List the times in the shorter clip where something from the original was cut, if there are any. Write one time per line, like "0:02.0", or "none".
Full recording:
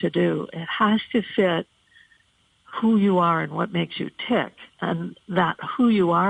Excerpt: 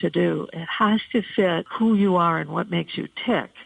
0:01.7